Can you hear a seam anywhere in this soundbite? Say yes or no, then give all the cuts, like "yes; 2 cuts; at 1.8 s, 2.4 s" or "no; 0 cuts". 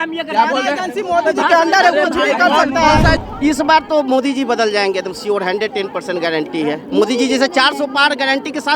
yes; 1 cut; at 3.2 s